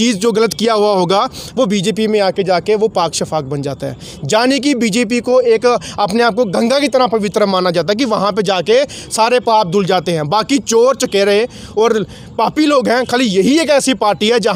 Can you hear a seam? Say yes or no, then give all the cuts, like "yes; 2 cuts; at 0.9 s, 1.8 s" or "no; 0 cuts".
no; 0 cuts